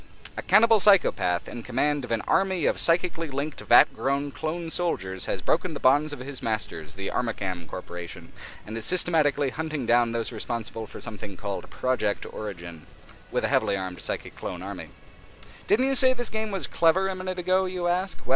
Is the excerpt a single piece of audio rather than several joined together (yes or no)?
yes